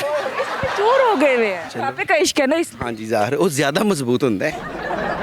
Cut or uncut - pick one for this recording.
cut